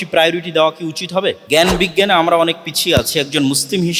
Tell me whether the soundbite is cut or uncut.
cut